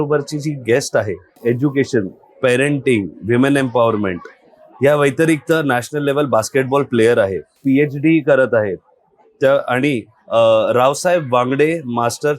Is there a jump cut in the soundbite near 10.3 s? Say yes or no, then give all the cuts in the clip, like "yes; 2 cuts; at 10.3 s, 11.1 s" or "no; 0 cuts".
no; 2 cuts; at 1.3 s, 7.5 s